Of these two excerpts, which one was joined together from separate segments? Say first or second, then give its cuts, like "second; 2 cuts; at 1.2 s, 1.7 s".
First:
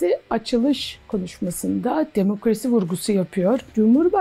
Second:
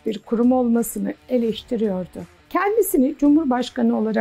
second; 2 cuts; at 1.1 s, 2.3 s